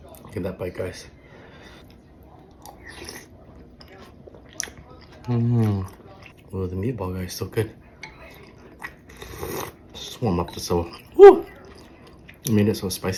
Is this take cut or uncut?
uncut